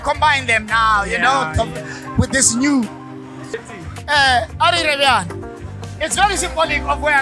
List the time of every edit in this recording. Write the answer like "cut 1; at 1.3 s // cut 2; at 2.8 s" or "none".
cut 1; at 3.5 s